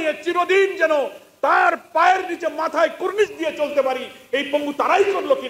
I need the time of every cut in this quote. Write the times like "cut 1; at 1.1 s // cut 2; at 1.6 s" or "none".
none